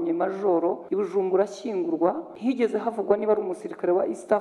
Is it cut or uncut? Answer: cut